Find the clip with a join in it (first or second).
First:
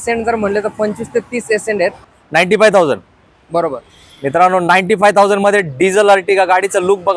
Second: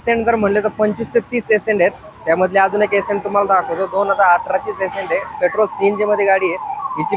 first